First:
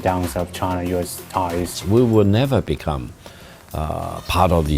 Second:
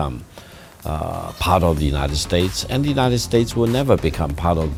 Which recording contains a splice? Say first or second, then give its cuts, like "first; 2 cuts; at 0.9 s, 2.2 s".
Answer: first; 1 cut; at 1.7 s